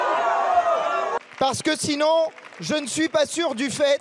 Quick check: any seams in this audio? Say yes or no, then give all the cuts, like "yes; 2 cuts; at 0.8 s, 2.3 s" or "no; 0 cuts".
yes; 1 cut; at 1.2 s